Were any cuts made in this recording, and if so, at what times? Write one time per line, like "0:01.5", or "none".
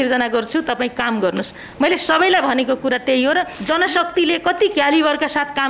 0:03.5